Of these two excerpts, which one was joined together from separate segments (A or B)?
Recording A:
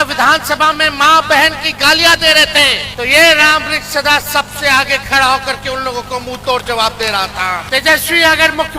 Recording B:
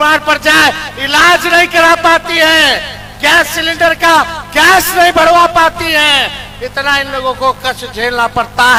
A